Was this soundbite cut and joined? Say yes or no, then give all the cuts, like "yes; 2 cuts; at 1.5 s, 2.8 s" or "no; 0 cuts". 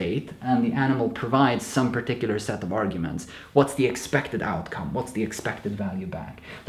no; 0 cuts